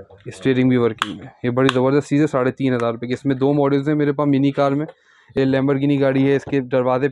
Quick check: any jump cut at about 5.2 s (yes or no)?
yes